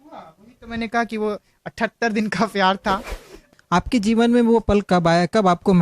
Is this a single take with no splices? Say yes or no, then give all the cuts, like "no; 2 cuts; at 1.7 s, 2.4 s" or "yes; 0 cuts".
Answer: no; 1 cut; at 3.5 s